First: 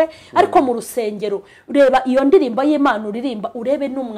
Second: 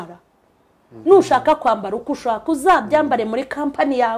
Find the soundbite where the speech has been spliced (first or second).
second